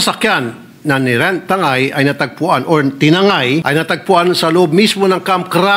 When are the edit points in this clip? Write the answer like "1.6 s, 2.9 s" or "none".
3.6 s